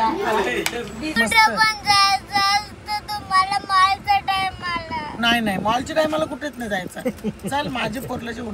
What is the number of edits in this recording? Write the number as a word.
one